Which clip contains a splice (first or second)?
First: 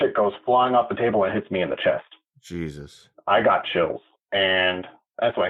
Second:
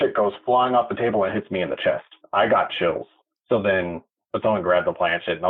second